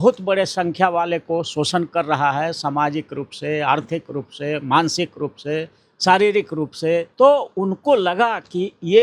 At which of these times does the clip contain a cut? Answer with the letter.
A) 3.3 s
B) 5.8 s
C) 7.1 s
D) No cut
C